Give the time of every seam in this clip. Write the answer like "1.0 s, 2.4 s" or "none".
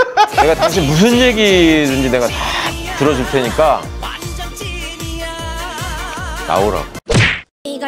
none